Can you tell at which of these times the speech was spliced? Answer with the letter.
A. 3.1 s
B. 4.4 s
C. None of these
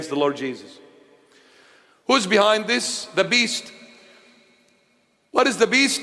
C